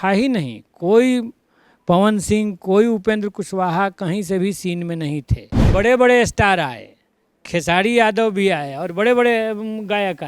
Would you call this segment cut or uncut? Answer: cut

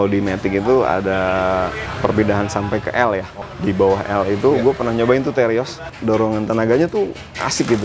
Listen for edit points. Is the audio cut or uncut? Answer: cut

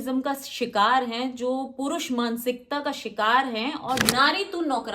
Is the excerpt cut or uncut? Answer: cut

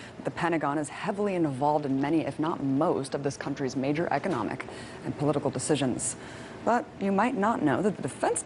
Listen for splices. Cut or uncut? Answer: cut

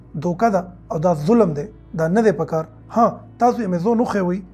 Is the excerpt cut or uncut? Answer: uncut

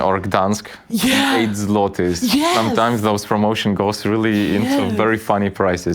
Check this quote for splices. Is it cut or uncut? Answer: uncut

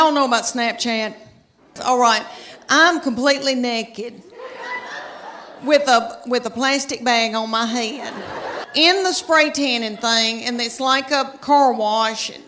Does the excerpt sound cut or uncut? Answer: cut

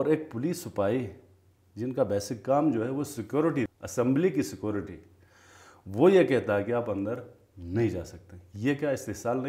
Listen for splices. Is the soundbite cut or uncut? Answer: cut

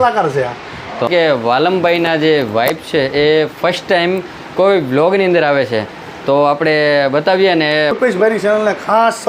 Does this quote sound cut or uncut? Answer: cut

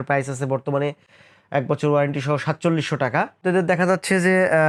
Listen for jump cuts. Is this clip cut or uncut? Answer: uncut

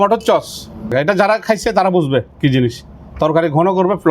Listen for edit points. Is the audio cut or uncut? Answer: cut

